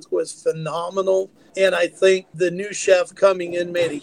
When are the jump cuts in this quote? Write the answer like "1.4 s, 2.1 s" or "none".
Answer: 1.4 s, 2.3 s